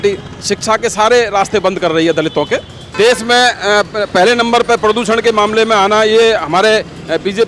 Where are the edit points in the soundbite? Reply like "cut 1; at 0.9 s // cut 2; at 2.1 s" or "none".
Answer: cut 1; at 2.9 s